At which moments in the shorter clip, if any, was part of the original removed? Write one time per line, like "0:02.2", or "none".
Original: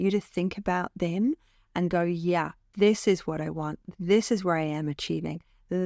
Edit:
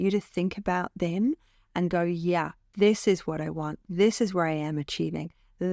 0:03.8